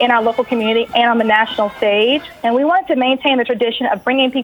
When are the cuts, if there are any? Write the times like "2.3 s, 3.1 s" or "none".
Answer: 2.3 s